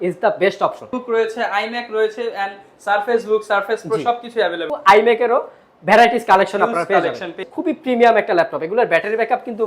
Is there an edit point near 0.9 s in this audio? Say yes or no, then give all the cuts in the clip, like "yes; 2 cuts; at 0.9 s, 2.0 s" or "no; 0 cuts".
yes; 3 cuts; at 0.9 s, 4.6 s, 7.4 s